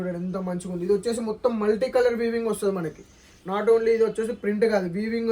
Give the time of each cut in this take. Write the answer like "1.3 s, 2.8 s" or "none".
none

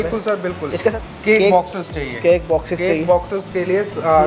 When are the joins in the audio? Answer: 1.0 s

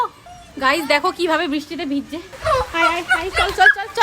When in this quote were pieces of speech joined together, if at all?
2.3 s

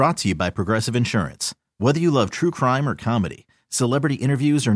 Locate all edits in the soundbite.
none

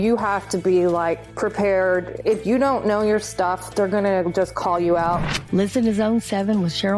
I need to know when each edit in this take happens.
1.3 s, 2.2 s, 5.2 s

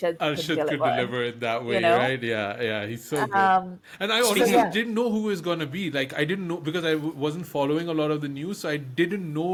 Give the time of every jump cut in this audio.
none

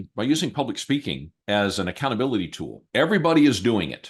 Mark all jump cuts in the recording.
none

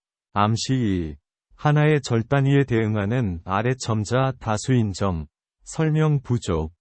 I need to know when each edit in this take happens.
none

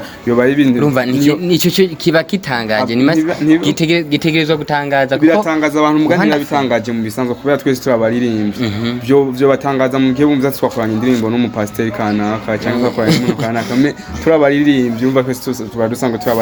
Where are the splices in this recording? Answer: none

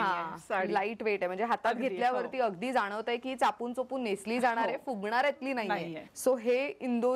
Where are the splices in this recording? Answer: 6.0 s

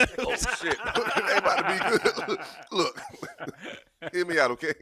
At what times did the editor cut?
none

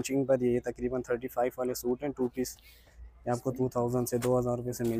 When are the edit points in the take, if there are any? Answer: none

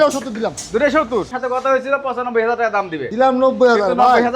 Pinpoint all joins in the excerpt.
1.3 s, 3.0 s

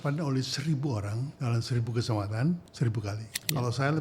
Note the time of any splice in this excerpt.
1.2 s, 3.2 s

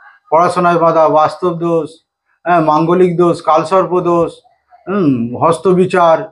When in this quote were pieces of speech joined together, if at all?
none

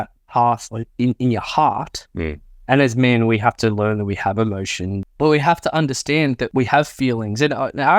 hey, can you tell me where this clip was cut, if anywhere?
5.0 s, 6.4 s

